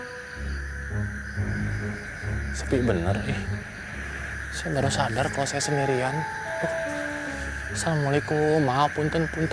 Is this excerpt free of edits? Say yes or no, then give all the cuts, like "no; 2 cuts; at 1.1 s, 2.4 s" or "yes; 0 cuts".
yes; 0 cuts